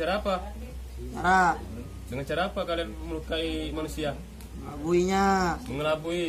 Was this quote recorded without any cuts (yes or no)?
yes